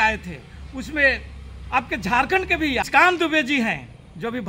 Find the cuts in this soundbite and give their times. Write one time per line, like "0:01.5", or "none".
0:02.9